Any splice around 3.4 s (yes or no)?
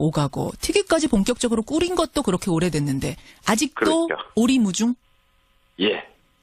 no